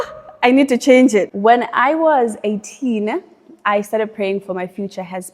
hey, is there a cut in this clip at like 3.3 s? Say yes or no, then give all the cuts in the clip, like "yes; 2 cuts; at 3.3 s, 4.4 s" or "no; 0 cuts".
no; 1 cut; at 1.3 s